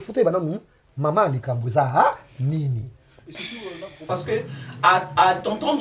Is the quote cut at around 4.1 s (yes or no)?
yes